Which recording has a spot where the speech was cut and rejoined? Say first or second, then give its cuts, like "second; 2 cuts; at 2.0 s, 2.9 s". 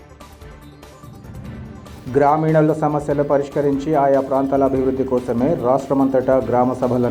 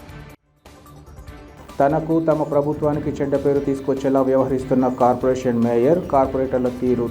second; 1 cut; at 1.5 s